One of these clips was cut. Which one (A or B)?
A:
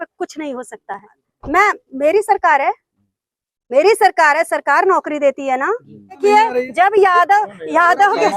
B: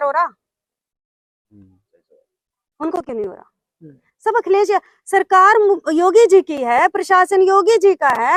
A